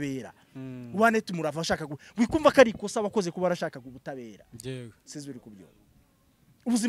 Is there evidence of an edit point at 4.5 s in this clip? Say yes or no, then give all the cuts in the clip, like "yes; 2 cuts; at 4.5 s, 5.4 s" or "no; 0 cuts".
no; 0 cuts